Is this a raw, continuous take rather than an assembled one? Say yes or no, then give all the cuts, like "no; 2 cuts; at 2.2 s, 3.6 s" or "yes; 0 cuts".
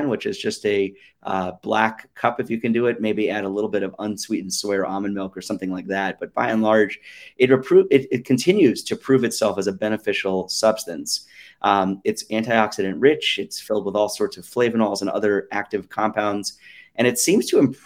yes; 0 cuts